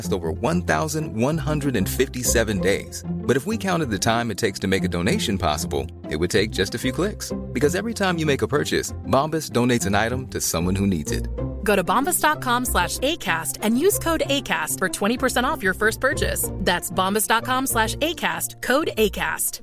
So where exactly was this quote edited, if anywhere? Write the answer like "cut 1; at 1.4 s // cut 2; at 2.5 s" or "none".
none